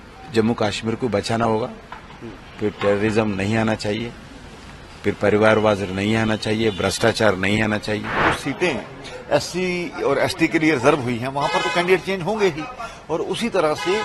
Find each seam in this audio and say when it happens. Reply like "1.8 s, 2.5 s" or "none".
8.2 s